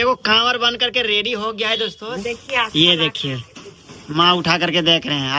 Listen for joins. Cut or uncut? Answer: cut